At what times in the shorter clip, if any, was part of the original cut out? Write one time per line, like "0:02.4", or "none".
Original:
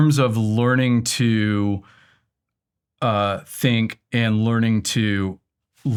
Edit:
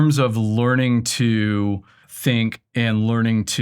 0:02.1

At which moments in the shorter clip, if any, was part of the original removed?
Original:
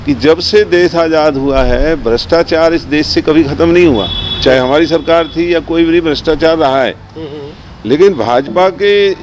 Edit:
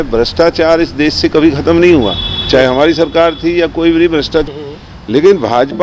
0:04.5

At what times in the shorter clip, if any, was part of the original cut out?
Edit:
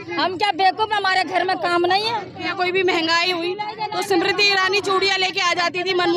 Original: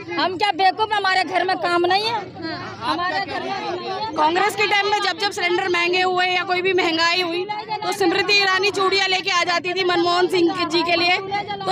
0:02.5

